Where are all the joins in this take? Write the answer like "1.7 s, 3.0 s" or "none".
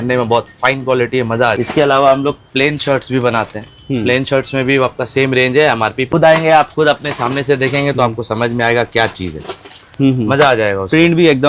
1.6 s, 6.1 s, 9.9 s